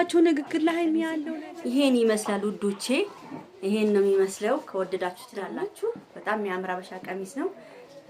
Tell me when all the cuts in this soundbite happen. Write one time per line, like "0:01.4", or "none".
0:01.1
0:05.5

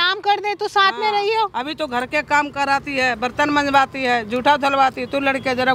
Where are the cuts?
none

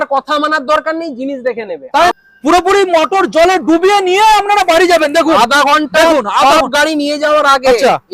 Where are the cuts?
0:02.1

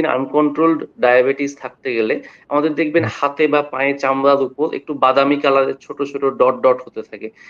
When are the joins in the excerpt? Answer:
none

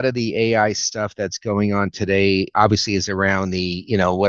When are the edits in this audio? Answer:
0:02.5

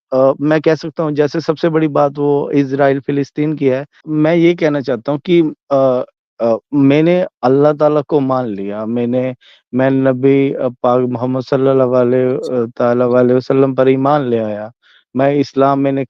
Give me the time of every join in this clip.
0:04.0

